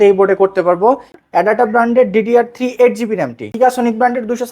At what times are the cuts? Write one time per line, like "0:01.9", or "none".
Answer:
0:01.1
0:03.4